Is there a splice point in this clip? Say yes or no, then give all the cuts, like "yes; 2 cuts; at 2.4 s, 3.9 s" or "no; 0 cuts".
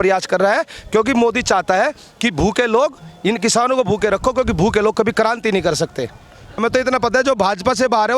yes; 1 cut; at 6.6 s